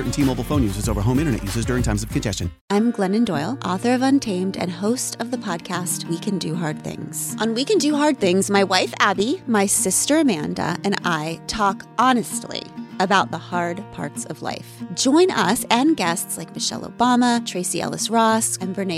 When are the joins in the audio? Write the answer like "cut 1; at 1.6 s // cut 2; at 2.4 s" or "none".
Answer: cut 1; at 2.5 s